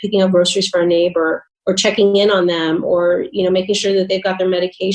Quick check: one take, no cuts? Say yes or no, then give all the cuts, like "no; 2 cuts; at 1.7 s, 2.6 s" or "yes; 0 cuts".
no; 1 cut; at 1.5 s